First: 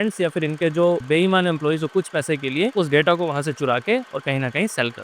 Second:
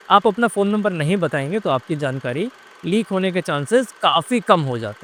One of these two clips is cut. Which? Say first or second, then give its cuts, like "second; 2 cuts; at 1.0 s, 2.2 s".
first; 2 cuts; at 1.0 s, 2.7 s